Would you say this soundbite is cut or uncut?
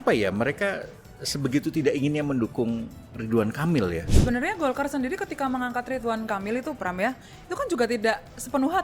cut